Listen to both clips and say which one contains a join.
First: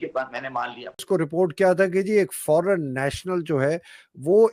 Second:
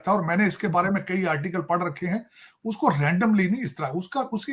first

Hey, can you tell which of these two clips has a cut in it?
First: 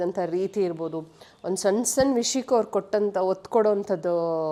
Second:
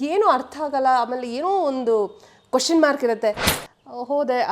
second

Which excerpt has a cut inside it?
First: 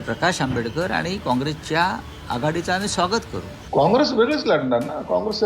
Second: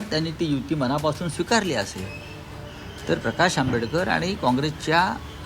first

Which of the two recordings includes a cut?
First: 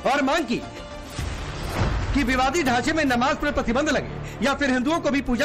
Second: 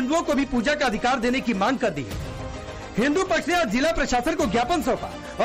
first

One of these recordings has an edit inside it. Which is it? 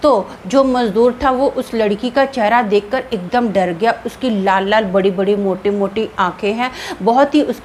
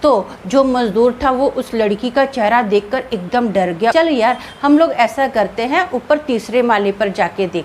second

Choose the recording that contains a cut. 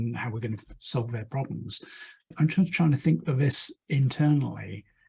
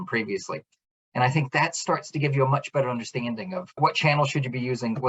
second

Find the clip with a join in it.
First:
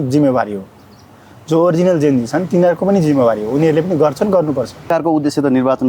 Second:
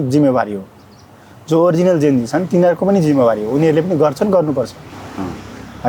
first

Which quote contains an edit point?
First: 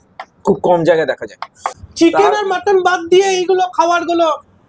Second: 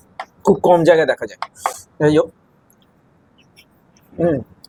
first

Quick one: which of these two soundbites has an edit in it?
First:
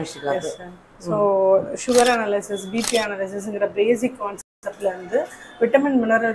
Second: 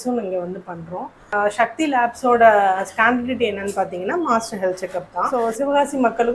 second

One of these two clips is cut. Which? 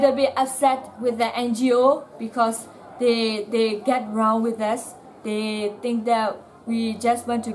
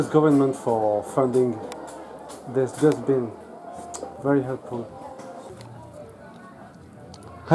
second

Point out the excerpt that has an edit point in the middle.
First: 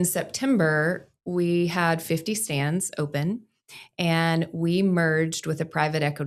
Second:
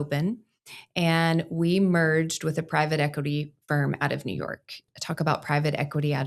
second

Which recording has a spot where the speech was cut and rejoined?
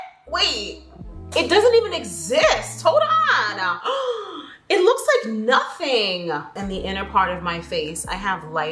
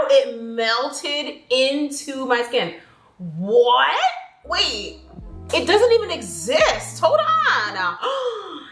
first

